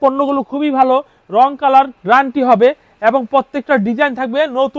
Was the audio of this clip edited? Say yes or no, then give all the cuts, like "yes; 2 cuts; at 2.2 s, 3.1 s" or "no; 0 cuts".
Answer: no; 0 cuts